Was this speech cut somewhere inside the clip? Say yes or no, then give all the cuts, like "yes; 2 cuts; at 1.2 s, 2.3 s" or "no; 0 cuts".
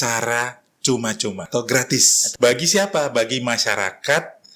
yes; 2 cuts; at 1.4 s, 2.2 s